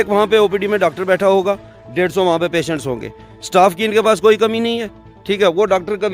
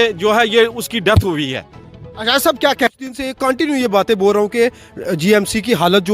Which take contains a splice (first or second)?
second